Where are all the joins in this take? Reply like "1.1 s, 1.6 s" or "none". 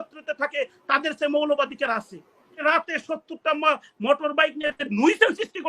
2.6 s